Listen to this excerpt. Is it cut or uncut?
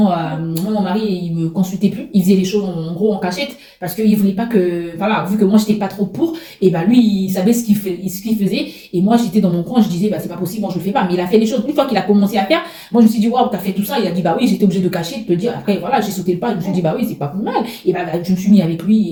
uncut